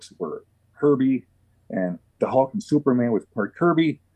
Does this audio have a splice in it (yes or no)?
no